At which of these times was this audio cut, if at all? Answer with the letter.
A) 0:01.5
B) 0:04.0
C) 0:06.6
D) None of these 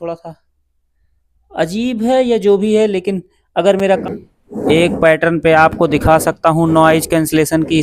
B